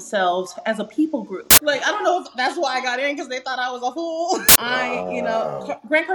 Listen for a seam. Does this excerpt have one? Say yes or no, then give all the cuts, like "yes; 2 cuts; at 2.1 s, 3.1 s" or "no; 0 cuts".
yes; 2 cuts; at 1.6 s, 4.5 s